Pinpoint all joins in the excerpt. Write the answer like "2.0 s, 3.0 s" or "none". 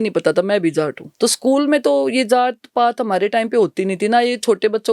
1.0 s